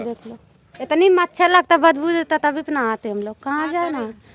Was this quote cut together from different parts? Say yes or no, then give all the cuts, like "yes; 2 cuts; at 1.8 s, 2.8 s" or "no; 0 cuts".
yes; 1 cut; at 1.1 s